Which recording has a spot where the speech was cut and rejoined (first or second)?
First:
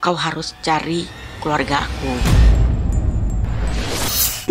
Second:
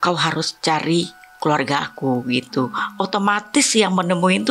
first